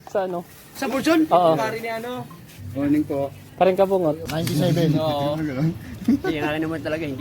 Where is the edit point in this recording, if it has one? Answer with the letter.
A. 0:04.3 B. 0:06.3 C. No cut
A